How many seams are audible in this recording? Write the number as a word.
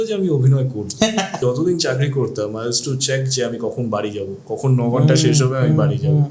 one